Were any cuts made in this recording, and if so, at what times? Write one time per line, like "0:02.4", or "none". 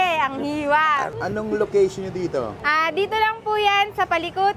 0:01.1